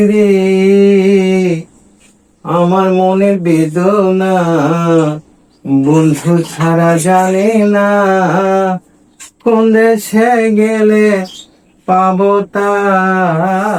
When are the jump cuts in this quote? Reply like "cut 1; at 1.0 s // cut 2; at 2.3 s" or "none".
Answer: none